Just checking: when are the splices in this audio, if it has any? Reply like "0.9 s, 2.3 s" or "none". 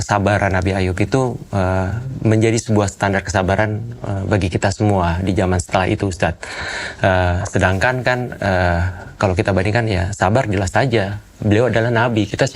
none